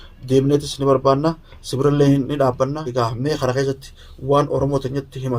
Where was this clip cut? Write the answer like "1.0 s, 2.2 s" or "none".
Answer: 2.9 s